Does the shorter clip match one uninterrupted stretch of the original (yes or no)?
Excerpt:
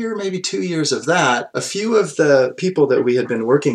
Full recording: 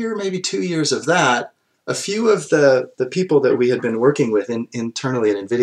no